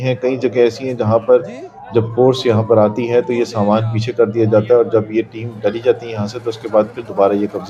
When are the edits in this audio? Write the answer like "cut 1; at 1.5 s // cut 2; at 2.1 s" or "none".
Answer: none